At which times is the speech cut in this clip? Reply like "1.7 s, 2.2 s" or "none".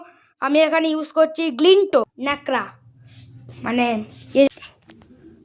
2.1 s, 4.5 s